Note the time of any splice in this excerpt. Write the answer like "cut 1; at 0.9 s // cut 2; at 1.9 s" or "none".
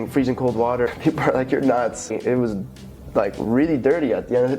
cut 1; at 0.9 s // cut 2; at 2.1 s